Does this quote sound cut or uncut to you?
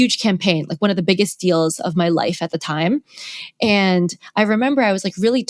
uncut